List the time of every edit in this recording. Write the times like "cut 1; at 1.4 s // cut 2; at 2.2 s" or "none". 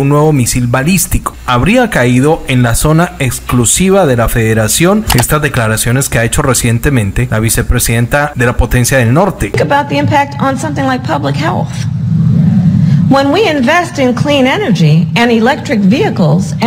cut 1; at 1.4 s // cut 2; at 5.1 s // cut 3; at 7.2 s // cut 4; at 8.3 s // cut 5; at 9.6 s